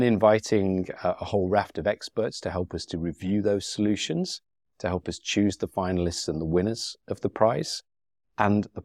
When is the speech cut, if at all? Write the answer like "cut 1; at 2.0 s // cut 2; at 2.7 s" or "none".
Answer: none